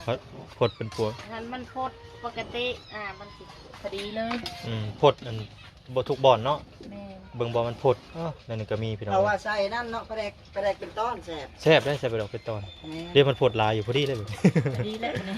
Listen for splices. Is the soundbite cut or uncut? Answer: uncut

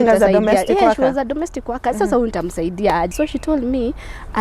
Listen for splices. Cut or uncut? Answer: cut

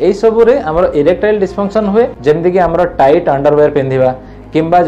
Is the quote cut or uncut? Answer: cut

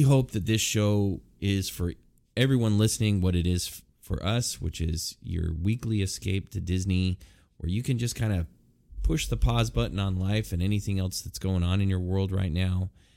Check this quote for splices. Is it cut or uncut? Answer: uncut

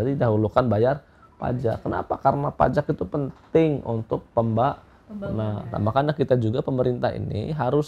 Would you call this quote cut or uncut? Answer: uncut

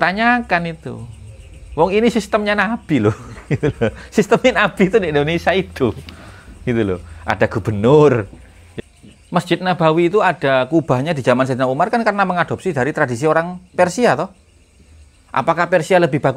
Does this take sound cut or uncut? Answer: cut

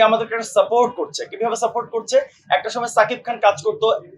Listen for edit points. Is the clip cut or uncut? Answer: uncut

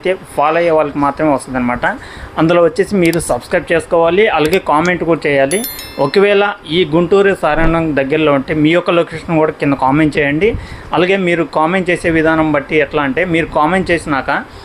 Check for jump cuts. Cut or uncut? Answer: uncut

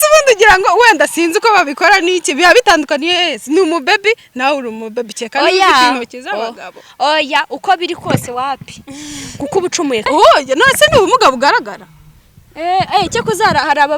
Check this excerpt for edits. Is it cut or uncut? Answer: cut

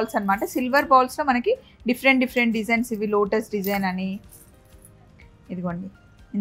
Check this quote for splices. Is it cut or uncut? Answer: uncut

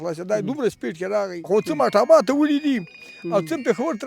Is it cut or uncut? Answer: cut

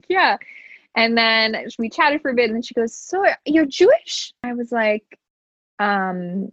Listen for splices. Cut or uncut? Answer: cut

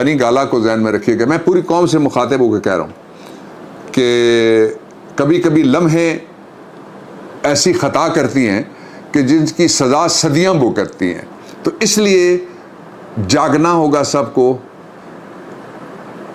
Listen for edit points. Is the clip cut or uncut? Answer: uncut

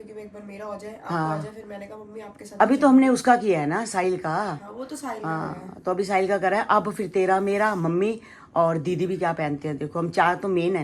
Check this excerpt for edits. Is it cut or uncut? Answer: uncut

